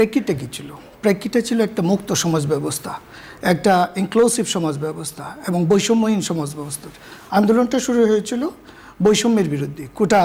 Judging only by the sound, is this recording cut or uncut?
uncut